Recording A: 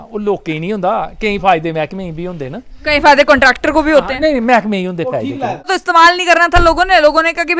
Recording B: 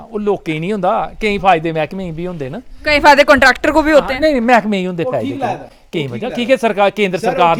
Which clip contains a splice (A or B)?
A